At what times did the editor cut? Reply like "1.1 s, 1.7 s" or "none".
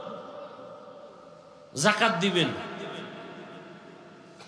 1.6 s